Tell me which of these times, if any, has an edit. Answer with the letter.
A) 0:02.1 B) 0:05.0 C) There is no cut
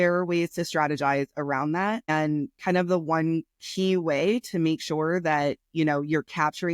A